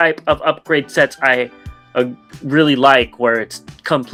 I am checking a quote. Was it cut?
no; 0 cuts

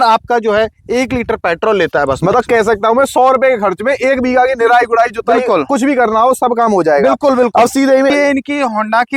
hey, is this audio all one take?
no; 1 cut; at 8.1 s

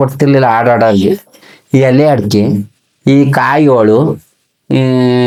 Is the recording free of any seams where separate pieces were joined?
yes; 0 cuts

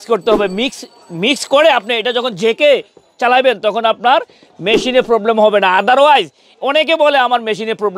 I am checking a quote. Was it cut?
no; 0 cuts

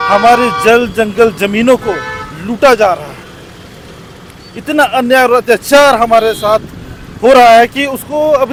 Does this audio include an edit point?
no; 0 cuts

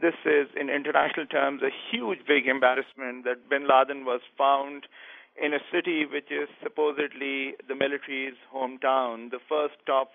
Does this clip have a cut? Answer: no; 0 cuts

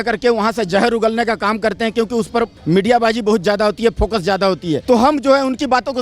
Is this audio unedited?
no; 2 cuts; at 2.6 s, 4.8 s

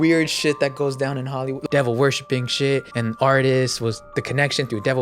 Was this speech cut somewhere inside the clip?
yes; 3 cuts; at 1.5 s, 2.9 s, 4.0 s

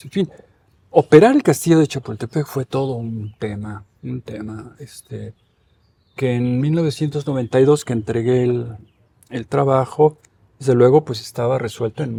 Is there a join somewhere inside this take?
no; 0 cuts

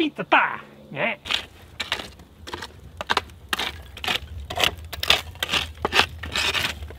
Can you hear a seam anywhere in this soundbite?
no; 0 cuts

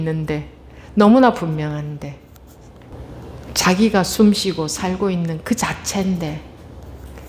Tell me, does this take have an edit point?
no; 0 cuts

